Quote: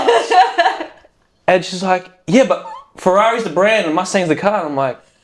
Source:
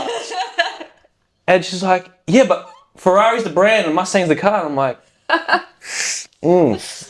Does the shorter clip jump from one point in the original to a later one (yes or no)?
no